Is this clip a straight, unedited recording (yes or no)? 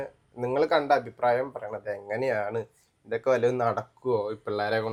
yes